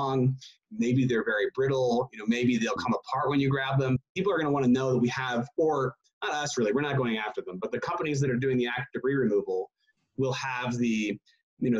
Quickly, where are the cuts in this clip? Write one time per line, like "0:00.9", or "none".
0:04.0